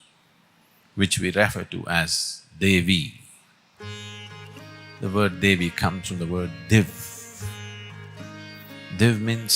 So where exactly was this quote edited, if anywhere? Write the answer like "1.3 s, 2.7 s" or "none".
none